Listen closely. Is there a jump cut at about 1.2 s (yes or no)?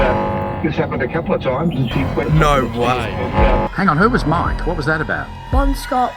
no